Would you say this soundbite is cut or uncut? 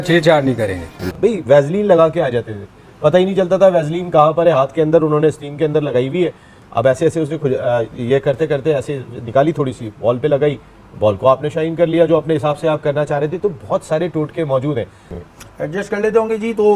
cut